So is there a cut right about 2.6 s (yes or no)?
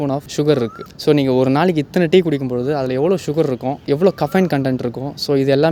no